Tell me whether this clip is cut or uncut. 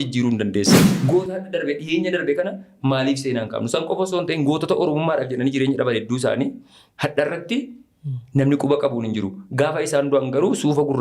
cut